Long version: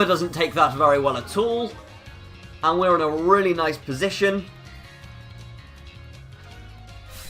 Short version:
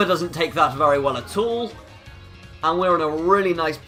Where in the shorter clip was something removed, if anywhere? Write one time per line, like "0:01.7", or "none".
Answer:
none